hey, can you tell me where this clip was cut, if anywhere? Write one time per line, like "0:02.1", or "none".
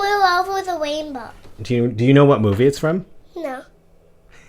0:03.2